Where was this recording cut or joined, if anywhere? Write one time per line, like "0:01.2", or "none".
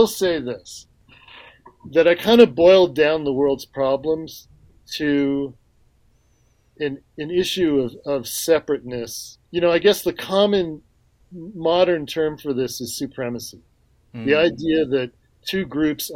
0:01.0
0:09.3